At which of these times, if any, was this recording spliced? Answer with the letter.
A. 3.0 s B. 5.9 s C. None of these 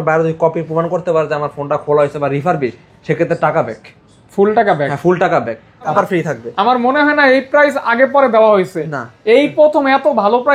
B